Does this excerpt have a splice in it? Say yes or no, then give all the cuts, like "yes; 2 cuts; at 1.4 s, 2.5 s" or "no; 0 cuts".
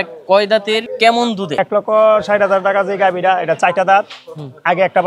yes; 2 cuts; at 0.9 s, 1.6 s